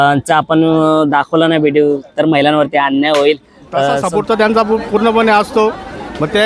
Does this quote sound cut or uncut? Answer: cut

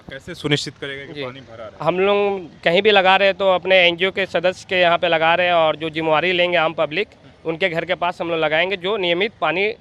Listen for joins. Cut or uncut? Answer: uncut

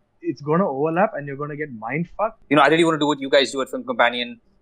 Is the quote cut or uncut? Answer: cut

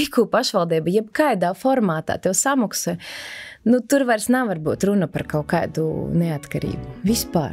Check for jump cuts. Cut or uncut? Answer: uncut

